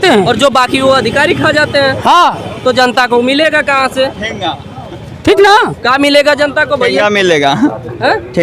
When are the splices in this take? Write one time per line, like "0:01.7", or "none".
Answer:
none